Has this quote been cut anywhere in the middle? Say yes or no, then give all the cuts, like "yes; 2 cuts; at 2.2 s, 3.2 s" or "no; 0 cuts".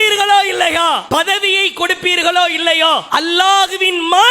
yes; 2 cuts; at 1.0 s, 3.0 s